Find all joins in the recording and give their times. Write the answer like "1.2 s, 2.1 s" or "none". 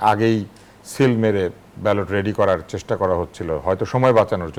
none